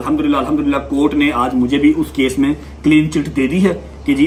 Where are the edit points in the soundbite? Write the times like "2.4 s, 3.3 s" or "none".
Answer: none